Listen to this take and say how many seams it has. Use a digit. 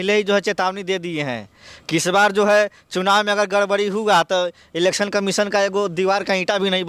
0